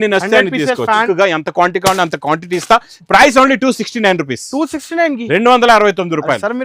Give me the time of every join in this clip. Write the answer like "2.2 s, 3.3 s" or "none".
1.0 s